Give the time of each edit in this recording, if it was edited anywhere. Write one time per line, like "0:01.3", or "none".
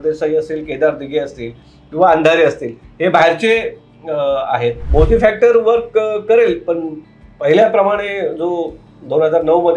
0:04.8